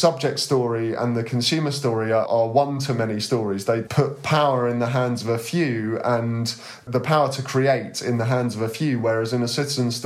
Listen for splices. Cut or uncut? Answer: cut